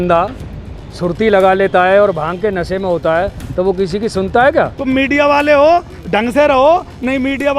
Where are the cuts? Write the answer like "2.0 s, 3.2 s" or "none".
4.8 s